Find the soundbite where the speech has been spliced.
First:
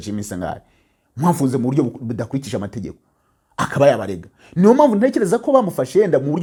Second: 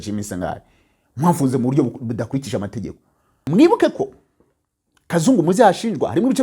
second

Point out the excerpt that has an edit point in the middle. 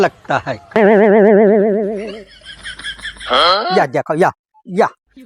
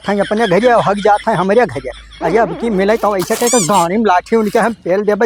first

